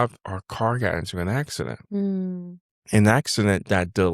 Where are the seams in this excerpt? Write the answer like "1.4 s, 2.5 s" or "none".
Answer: none